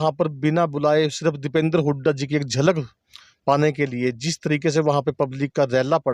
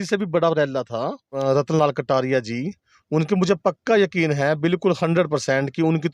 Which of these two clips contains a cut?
second; 1 cut; at 1.3 s

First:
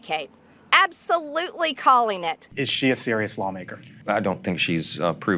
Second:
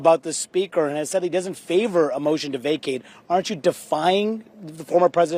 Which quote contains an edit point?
first; 2 cuts; at 2.4 s, 3.9 s

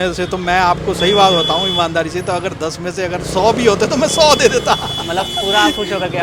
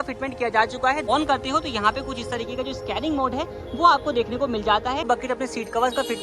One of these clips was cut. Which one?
second; 2 cuts; at 1.0 s, 5.0 s

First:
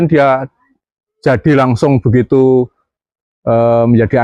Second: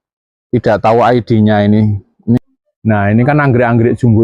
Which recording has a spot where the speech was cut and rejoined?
second; 1 cut; at 2.4 s

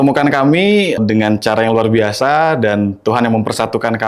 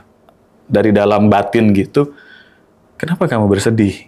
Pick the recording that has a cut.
first; 1 cut; at 1.0 s

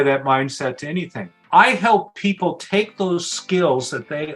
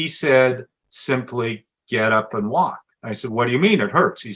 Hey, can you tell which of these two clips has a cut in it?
first; 1 cut; at 1.4 s

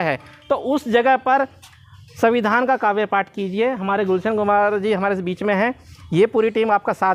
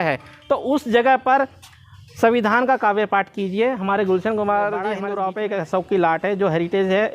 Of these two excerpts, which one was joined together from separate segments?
second; 1 cut; at 5.0 s

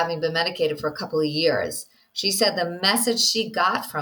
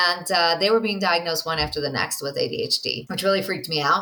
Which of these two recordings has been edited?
second; 1 cut; at 3.0 s

